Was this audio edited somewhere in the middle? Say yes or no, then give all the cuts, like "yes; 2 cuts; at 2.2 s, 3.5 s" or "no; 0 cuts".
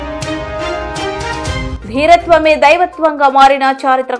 yes; 1 cut; at 1.7 s